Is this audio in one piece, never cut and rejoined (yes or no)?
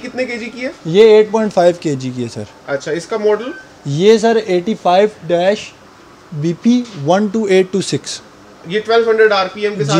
yes